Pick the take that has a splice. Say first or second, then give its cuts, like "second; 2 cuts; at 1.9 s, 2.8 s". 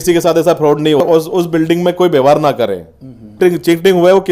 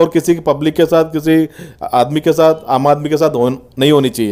first; 2 cuts; at 1.0 s, 3.4 s